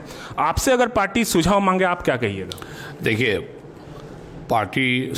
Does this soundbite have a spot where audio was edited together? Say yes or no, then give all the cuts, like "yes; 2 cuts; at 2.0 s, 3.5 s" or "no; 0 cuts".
no; 0 cuts